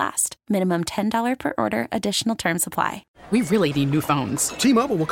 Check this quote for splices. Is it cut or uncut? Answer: cut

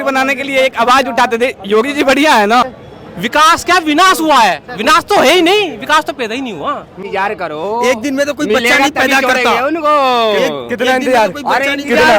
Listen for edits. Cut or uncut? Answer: cut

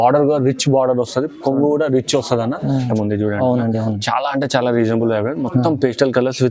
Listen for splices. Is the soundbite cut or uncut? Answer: cut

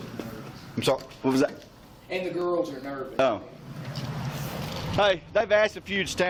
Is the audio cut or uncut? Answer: uncut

